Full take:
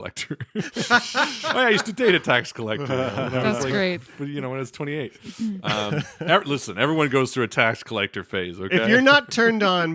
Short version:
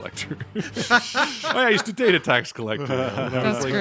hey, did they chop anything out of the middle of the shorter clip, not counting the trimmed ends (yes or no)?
no